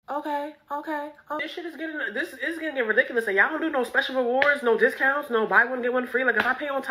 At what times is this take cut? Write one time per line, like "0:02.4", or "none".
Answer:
0:01.4